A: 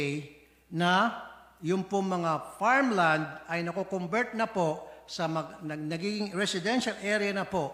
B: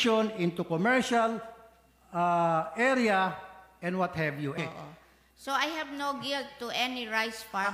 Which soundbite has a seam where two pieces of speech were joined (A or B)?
B